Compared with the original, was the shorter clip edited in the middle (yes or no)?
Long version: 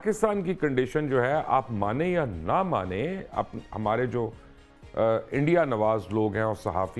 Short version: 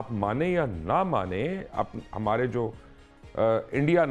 no